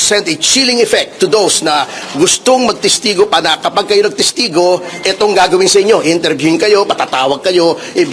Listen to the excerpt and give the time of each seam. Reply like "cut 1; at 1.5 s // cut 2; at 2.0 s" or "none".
none